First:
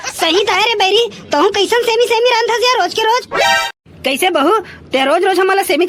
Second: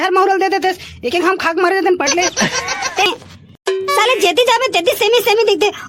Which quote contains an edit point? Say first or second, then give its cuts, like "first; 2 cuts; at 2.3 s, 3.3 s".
second; 1 cut; at 3.1 s